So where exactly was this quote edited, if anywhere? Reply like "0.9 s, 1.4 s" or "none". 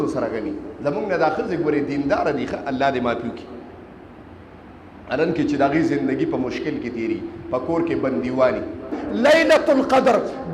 9.0 s

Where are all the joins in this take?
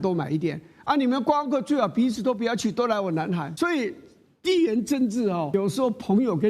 3.5 s, 5.5 s

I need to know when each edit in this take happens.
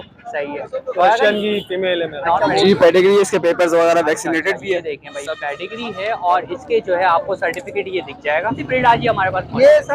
2.4 s, 8.6 s

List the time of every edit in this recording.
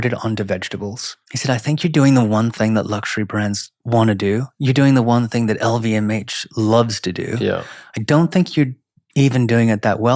1.2 s, 3.7 s

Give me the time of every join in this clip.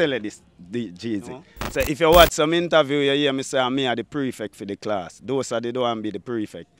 1.6 s

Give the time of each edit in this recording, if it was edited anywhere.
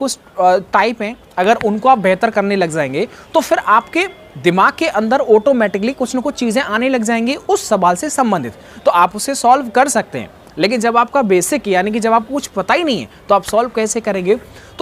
none

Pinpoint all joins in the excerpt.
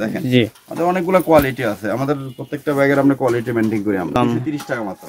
4.2 s

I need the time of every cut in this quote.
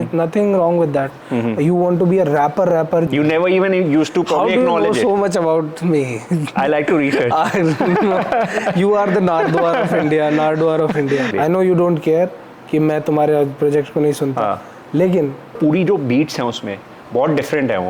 3.1 s, 11.3 s, 15.6 s

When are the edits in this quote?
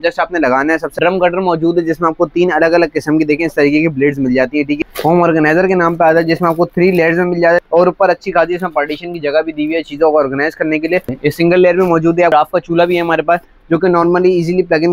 1.0 s, 4.8 s, 7.6 s, 11.1 s, 12.3 s

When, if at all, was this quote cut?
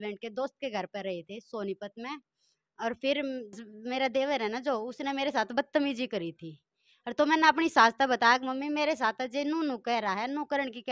3.7 s

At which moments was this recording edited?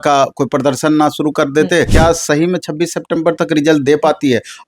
1.9 s

